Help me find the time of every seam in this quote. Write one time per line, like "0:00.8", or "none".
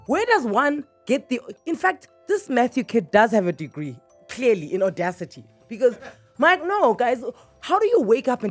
none